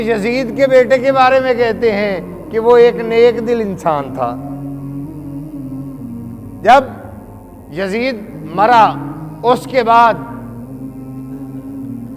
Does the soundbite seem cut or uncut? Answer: cut